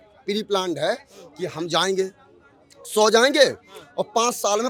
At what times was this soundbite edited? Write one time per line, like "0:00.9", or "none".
none